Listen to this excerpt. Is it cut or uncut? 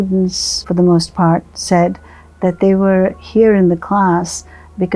uncut